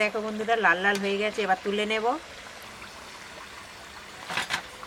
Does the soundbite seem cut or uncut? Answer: uncut